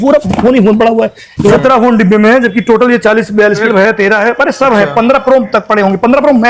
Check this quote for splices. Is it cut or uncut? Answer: cut